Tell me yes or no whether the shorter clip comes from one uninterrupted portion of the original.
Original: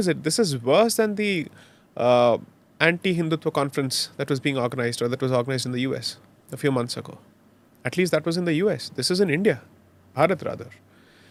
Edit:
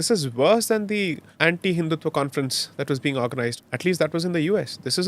no